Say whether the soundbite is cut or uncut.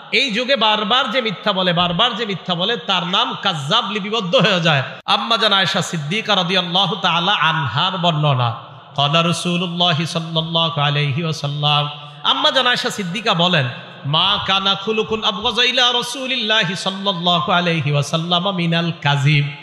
cut